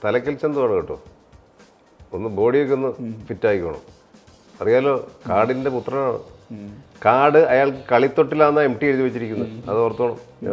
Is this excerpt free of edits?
yes; 0 cuts

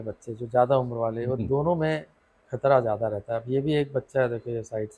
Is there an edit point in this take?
no; 0 cuts

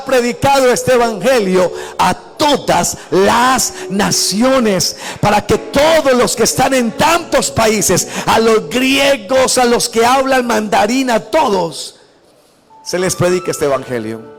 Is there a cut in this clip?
no; 0 cuts

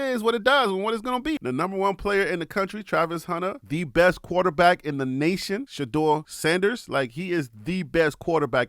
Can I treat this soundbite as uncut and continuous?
no; 1 cut; at 1.4 s

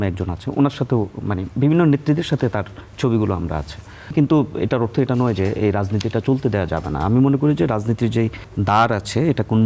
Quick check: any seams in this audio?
yes; 2 cuts; at 4.1 s, 8.5 s

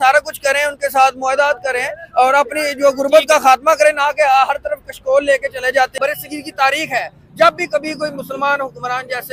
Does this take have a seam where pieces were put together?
yes; 1 cut; at 6.0 s

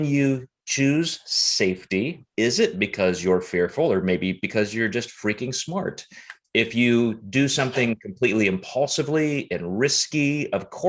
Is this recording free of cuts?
yes; 0 cuts

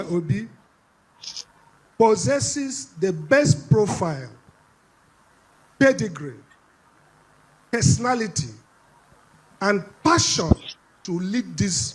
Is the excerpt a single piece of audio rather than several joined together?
yes; 0 cuts

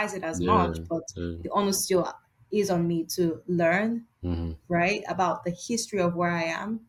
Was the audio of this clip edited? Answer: no; 0 cuts

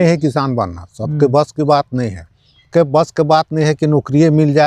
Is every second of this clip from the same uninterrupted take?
no; 1 cut; at 2.7 s

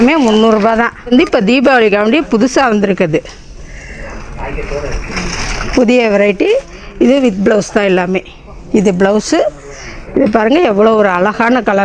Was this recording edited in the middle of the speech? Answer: yes; 1 cut; at 1.1 s

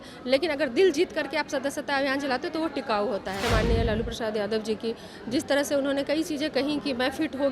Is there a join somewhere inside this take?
yes; 1 cut; at 3.4 s

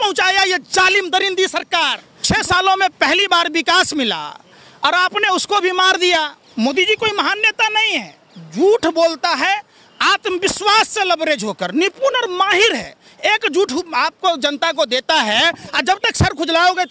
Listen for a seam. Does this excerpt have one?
yes; 2 cuts; at 2.1 s, 6.4 s

